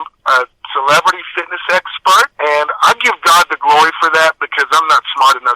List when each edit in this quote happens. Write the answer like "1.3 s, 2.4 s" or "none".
2.3 s